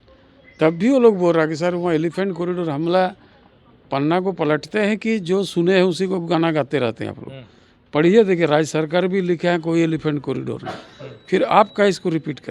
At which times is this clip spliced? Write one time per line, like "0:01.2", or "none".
none